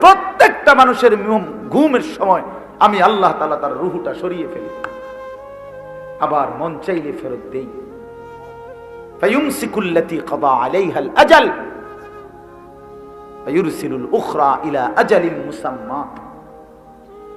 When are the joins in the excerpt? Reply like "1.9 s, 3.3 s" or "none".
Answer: 4.6 s, 5.9 s, 11.8 s, 13.4 s